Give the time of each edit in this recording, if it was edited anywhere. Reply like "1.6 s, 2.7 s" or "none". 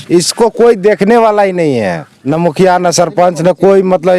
2.1 s